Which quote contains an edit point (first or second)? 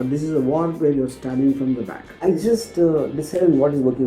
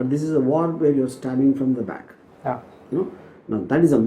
first